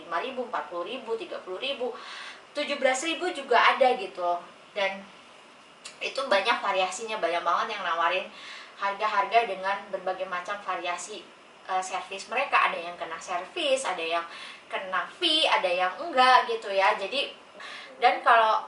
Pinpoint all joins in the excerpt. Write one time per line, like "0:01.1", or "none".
0:17.6